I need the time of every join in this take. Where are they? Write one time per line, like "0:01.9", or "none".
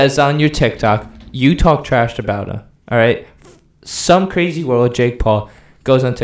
none